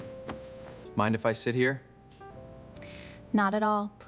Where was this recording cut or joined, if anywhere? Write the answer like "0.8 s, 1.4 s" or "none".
0.8 s, 2.3 s